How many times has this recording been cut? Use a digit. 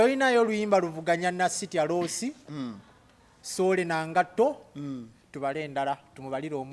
0